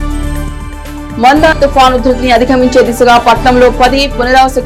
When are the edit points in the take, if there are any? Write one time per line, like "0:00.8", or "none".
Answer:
none